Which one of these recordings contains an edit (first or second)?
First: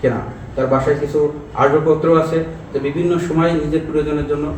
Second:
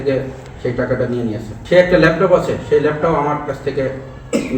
second